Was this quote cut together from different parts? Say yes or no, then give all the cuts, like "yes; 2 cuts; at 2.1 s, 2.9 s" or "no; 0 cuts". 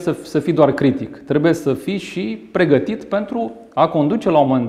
no; 0 cuts